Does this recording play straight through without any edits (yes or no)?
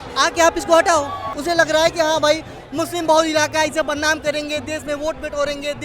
no